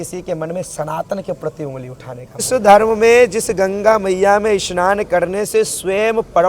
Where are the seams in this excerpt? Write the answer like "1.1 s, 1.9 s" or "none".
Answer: 2.3 s